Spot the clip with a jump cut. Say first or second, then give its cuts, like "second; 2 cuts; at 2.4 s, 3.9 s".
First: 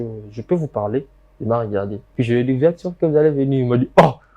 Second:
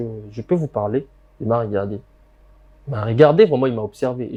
first; 1 cut; at 2.0 s